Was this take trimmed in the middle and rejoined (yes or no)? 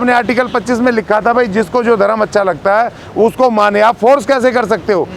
no